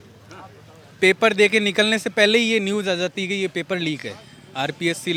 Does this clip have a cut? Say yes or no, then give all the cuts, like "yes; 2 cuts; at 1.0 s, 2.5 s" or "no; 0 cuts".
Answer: no; 0 cuts